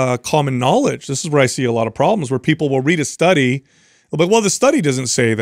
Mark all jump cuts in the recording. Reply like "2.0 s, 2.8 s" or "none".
none